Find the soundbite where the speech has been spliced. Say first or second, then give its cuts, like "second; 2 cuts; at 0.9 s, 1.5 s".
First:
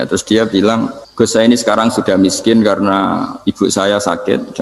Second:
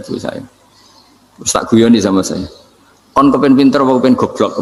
first; 1 cut; at 1.0 s